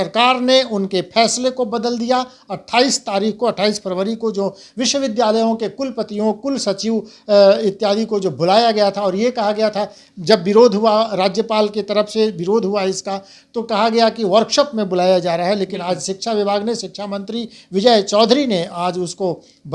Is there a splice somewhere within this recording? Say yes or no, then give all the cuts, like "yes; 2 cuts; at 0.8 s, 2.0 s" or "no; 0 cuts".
no; 0 cuts